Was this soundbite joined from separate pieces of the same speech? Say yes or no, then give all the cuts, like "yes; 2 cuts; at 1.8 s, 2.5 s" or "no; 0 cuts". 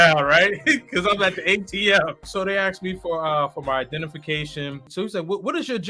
yes; 2 cuts; at 2.3 s, 4.9 s